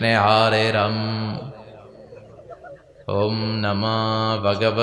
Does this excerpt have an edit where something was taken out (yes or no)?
no